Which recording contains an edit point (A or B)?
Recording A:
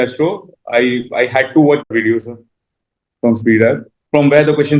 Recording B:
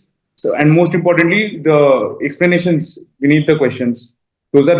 A